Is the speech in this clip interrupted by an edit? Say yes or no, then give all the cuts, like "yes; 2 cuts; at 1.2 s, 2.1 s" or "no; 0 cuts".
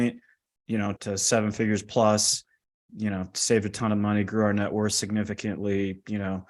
no; 0 cuts